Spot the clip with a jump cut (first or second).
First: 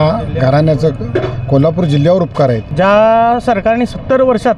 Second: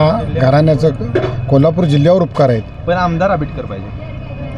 first